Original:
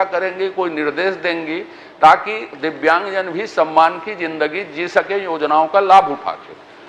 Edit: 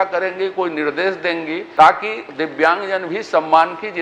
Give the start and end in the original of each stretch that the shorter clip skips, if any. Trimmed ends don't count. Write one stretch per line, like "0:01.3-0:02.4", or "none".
0:01.6-0:01.8